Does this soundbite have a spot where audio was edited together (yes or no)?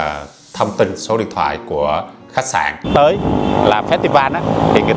yes